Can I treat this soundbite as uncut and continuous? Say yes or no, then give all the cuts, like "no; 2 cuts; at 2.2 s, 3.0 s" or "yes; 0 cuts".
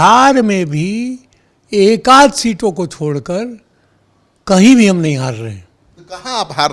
yes; 0 cuts